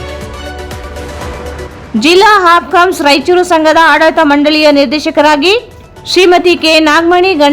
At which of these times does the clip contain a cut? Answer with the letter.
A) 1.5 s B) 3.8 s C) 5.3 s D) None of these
A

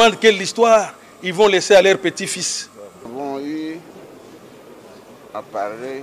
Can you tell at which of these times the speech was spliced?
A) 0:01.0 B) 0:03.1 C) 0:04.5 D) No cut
B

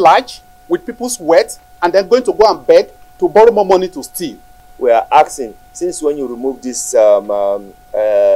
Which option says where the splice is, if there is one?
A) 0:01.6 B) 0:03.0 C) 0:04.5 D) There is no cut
C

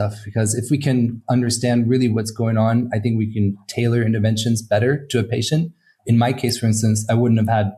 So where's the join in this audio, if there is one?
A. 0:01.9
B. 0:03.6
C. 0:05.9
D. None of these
C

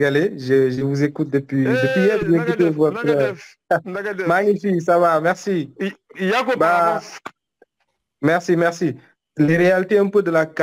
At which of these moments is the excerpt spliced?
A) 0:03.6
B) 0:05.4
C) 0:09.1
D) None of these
C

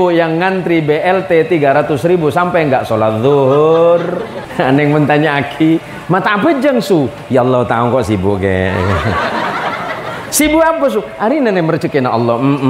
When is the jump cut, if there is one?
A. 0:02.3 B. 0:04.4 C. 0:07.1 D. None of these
B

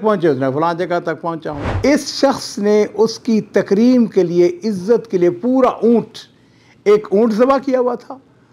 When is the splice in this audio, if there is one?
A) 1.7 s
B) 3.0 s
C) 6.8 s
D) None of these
A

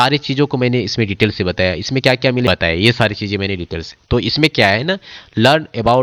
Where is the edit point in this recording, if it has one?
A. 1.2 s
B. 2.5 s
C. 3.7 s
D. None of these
B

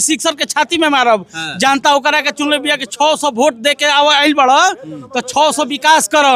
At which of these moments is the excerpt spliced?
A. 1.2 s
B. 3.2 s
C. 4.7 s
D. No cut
D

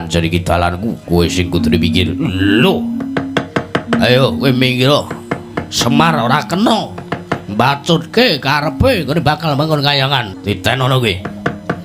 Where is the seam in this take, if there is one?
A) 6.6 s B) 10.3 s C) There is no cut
B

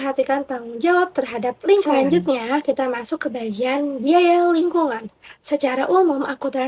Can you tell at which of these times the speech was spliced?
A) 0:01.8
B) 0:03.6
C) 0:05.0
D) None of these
A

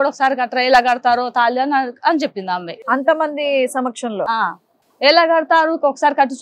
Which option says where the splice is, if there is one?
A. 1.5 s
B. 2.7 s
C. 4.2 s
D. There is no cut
B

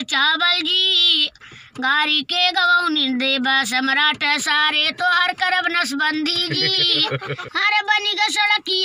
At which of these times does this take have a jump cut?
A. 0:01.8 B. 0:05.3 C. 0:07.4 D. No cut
C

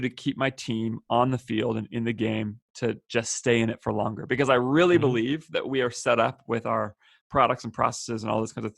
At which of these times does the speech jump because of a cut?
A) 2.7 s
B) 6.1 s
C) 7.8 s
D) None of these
A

